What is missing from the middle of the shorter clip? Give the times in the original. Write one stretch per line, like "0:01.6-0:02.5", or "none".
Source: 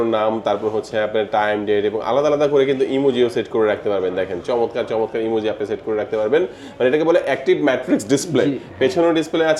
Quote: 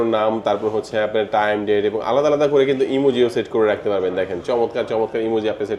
none

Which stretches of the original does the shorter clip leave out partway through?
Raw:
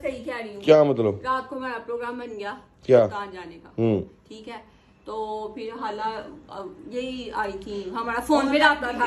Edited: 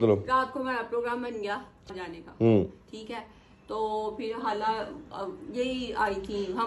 0:02.8-0:03.2

